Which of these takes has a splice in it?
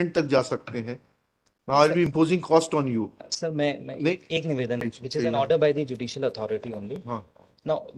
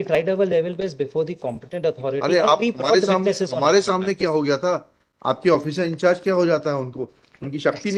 first; 1 cut; at 4.8 s

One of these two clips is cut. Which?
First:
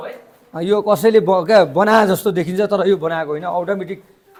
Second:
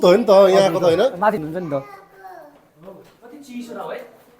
second; 1 cut; at 1.4 s

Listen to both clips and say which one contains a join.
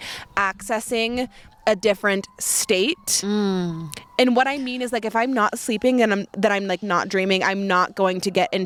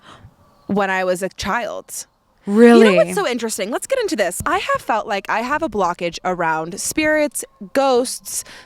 second; 1 cut; at 4.4 s

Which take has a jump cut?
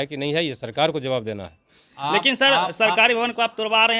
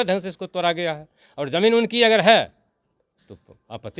first; 1 cut; at 1.9 s

